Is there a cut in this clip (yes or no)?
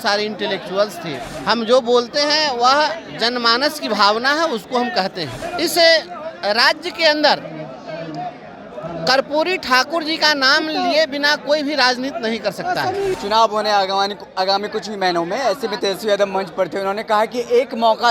yes